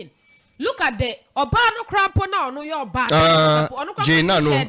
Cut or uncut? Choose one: uncut